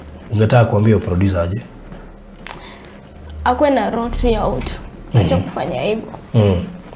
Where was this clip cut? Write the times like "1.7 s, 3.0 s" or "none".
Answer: none